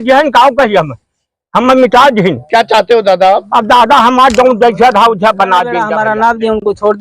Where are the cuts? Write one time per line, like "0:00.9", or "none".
0:05.9